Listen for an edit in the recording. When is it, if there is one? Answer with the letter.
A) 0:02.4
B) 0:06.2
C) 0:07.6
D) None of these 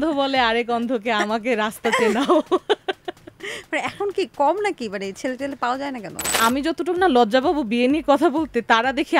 B